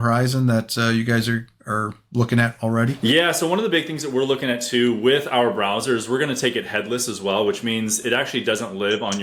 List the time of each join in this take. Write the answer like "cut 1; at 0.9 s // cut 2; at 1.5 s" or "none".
none

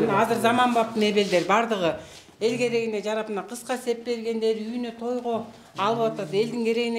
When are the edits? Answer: none

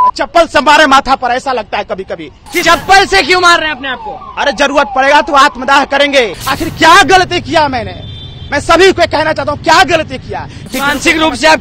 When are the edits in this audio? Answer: cut 1; at 2.5 s // cut 2; at 6.4 s // cut 3; at 10.7 s

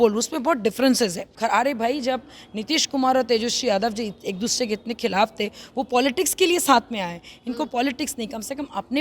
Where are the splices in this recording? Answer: cut 1; at 1.3 s

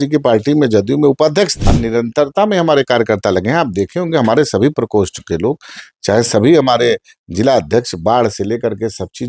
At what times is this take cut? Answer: cut 1; at 1.6 s

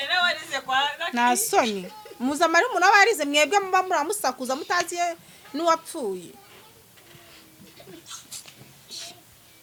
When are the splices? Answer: none

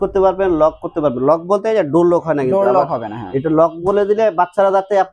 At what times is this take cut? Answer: none

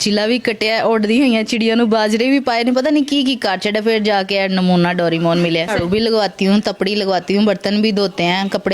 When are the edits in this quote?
cut 1; at 5.7 s

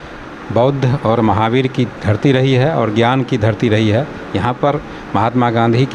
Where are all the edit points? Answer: none

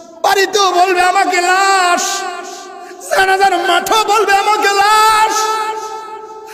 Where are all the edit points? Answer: none

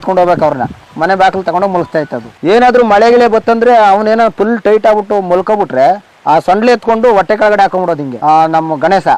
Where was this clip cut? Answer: cut 1; at 2.2 s // cut 2; at 6.1 s // cut 3; at 8.1 s

